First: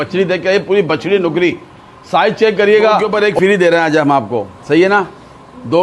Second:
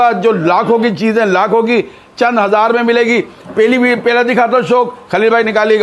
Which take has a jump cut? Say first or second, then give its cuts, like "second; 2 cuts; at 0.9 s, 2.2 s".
first; 1 cut; at 3.0 s